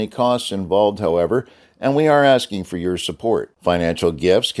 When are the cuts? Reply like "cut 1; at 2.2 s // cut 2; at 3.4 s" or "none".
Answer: none